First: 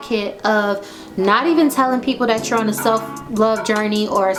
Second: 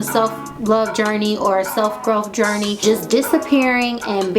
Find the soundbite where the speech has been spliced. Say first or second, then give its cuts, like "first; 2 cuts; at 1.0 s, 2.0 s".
second; 1 cut; at 2.8 s